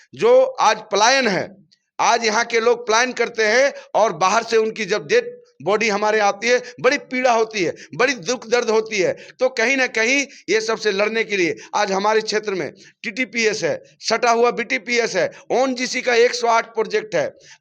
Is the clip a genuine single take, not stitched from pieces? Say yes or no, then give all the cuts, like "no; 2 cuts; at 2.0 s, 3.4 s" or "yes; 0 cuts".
yes; 0 cuts